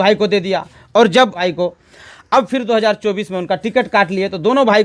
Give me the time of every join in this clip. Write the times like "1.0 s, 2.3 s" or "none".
1.4 s